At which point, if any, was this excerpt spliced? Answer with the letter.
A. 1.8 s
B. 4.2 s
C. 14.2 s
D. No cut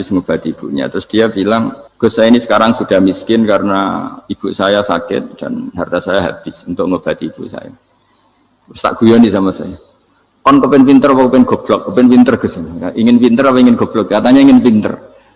A